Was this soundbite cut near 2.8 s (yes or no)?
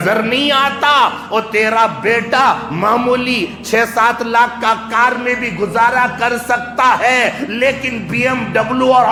no